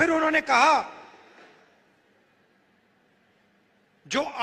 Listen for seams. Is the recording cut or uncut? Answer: uncut